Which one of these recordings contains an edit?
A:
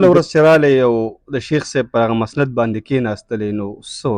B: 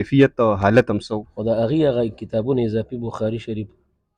B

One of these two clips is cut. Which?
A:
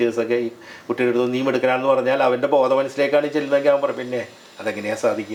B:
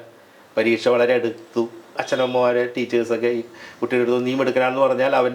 B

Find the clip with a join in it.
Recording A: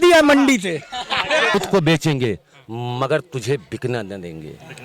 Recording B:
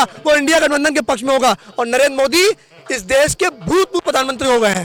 A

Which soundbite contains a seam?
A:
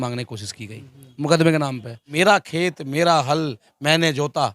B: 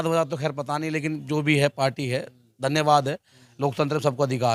A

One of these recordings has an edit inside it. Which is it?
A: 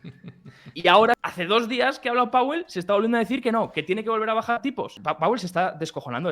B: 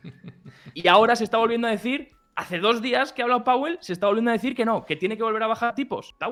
A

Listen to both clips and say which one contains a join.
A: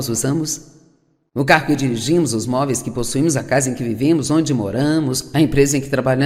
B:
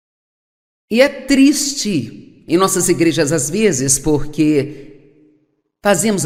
A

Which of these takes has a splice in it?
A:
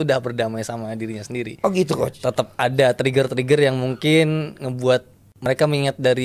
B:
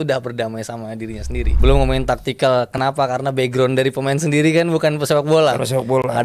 B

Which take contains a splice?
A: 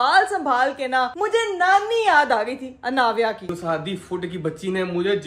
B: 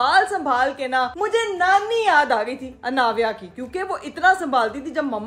A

